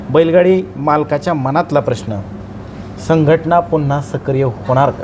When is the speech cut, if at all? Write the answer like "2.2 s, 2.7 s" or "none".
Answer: none